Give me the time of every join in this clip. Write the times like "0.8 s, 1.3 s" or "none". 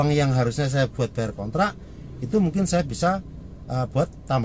none